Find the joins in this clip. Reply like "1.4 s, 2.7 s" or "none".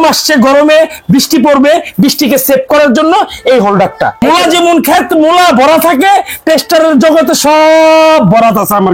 4.2 s